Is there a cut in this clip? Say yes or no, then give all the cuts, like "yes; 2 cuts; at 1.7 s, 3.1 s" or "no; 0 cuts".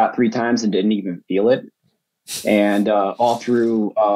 no; 0 cuts